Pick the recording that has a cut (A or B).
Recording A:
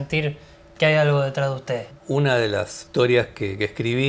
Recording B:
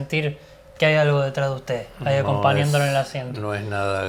A